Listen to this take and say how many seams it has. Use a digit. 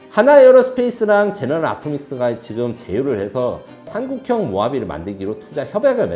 0